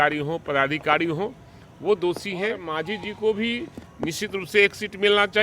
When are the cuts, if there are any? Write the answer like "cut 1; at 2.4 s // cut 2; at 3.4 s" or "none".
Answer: cut 1; at 2.7 s